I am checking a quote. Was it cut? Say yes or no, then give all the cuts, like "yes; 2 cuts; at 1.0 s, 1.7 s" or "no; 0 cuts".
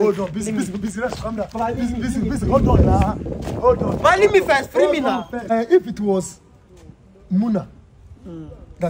yes; 1 cut; at 5.5 s